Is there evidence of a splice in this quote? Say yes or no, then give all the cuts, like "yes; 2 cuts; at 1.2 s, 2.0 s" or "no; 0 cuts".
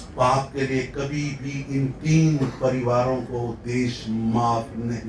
no; 0 cuts